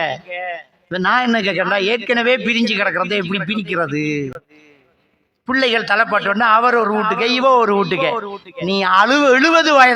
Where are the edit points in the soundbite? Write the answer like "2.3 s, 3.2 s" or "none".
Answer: none